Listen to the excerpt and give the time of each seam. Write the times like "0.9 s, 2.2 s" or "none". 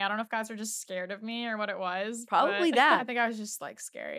3.0 s

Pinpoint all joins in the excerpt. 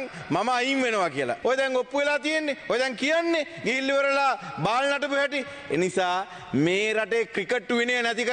1.4 s

